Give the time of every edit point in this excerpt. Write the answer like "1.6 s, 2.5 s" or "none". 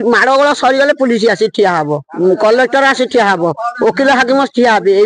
2.0 s